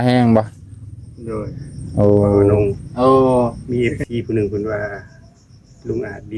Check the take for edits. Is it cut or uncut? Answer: cut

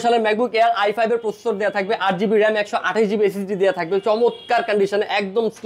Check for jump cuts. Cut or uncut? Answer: uncut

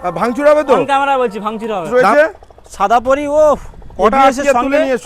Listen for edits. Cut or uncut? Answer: cut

